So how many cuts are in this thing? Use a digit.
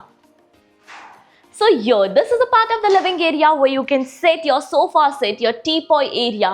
0